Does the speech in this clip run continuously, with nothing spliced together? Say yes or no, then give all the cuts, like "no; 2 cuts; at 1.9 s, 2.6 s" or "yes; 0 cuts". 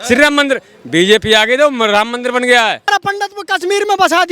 no; 1 cut; at 2.9 s